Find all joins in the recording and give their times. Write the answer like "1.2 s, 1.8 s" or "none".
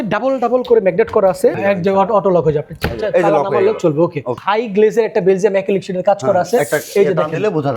1.6 s, 4.4 s